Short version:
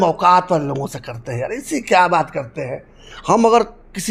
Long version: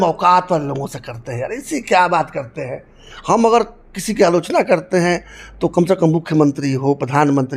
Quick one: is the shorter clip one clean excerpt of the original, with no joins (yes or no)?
yes